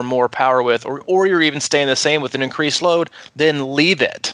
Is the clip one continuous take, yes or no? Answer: yes